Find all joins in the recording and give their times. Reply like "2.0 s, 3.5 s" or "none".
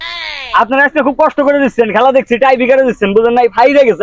none

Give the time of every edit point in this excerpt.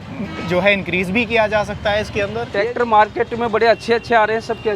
2.4 s

